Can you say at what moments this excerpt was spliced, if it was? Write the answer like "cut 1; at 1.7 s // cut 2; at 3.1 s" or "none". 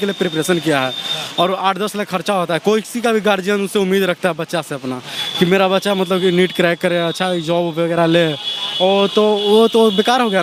none